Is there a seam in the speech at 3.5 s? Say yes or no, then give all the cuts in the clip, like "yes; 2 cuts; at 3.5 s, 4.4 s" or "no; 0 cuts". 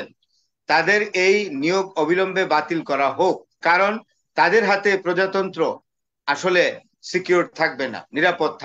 yes; 1 cut; at 3.5 s